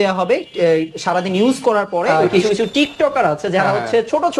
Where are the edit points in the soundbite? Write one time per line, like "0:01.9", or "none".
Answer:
0:02.3